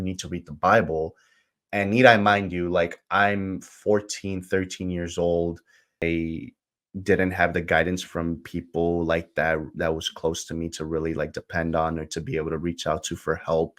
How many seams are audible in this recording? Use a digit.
1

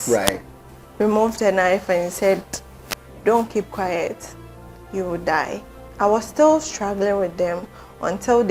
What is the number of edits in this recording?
1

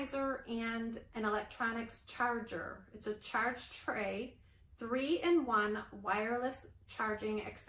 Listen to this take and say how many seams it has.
0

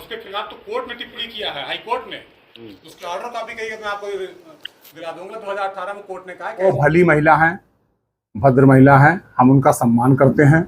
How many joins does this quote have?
1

